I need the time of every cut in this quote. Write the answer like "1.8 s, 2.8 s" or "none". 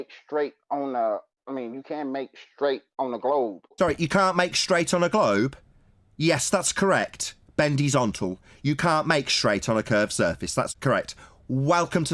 3.7 s, 10.7 s